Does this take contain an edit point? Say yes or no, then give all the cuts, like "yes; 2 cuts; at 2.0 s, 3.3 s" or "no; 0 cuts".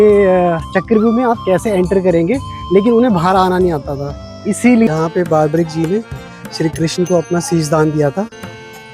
yes; 1 cut; at 5.0 s